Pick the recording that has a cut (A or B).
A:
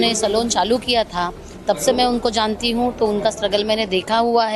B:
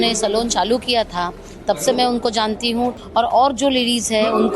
B